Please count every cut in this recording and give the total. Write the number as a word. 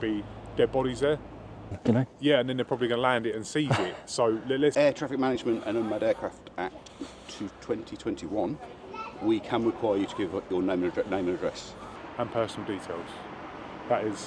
three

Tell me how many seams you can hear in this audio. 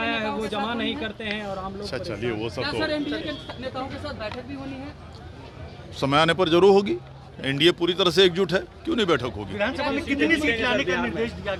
zero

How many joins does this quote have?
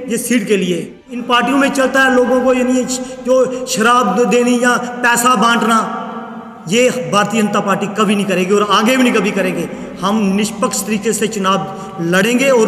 one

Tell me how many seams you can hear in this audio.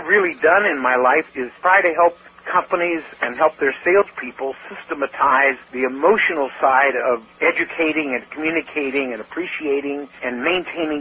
five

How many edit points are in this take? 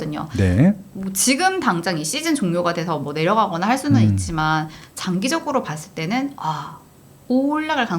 one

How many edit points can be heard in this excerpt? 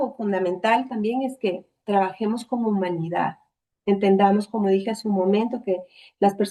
zero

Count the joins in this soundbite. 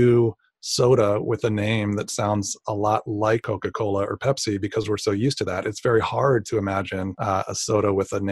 two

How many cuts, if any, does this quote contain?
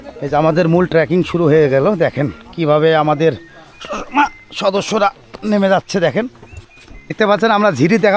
one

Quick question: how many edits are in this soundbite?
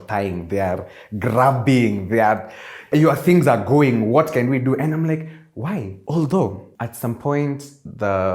two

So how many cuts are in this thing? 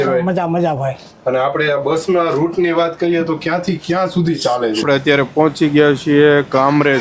one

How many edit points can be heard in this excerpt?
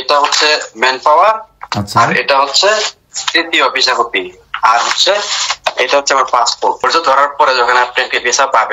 one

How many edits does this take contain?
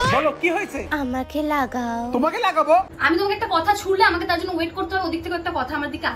one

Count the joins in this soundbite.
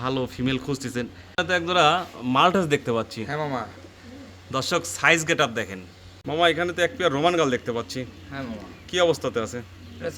two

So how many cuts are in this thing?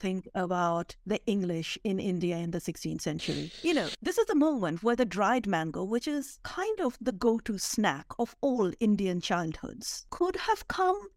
two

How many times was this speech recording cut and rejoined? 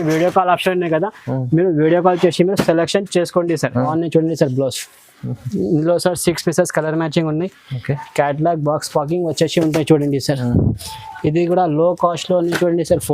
one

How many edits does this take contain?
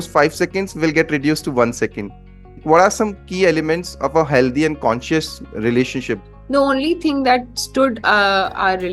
two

